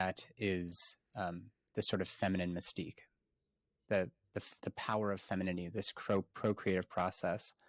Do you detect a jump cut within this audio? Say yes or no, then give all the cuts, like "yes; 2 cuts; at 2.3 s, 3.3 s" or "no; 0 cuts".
no; 0 cuts